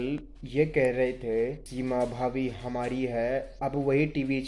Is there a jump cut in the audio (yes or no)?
yes